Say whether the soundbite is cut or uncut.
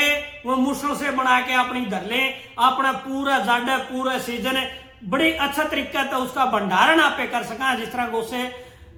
uncut